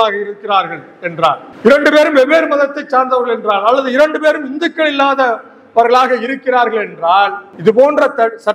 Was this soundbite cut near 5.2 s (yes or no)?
no